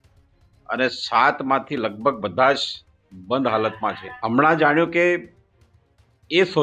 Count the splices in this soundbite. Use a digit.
1